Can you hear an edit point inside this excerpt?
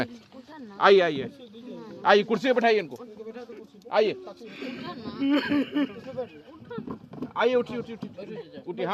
no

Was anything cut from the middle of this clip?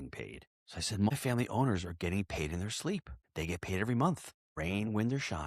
yes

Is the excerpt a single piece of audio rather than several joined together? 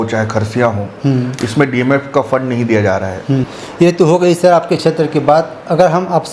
no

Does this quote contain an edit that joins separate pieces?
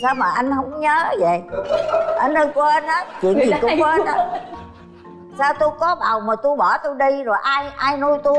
no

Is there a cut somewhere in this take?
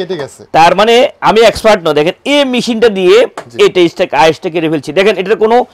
no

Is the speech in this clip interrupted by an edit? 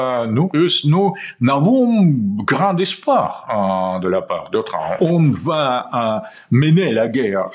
yes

